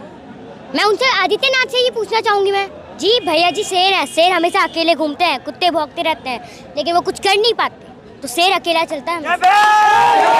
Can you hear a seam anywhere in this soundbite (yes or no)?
yes